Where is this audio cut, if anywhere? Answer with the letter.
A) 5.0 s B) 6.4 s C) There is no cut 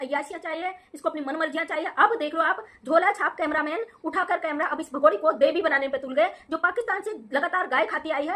C